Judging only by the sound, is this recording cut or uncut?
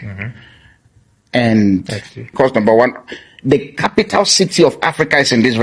cut